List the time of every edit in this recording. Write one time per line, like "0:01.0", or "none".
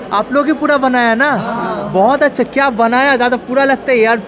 none